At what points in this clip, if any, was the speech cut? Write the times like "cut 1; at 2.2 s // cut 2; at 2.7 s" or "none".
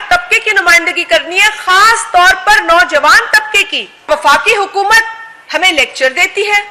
cut 1; at 4.1 s